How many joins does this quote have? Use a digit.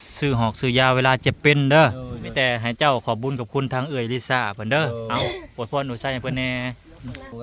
1